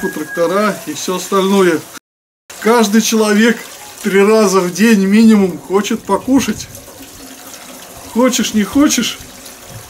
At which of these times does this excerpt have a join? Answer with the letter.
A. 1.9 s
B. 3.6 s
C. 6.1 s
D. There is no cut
A